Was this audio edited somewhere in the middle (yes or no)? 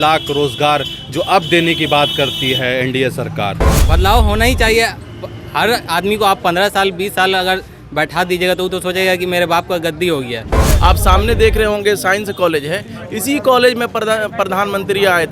yes